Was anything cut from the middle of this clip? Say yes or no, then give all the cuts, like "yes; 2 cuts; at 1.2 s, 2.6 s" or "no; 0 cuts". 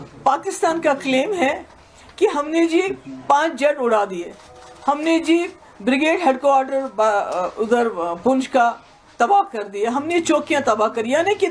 no; 0 cuts